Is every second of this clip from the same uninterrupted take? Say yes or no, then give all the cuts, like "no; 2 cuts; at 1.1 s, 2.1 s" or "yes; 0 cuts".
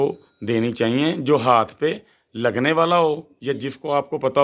yes; 0 cuts